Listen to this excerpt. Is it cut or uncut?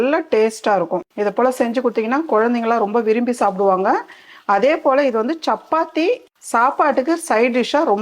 cut